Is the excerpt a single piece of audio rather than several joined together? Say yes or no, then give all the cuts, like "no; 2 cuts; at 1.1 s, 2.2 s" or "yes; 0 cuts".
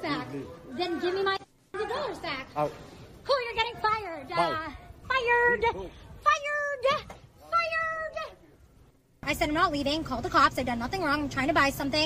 yes; 0 cuts